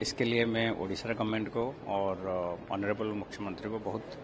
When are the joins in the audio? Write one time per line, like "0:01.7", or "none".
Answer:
none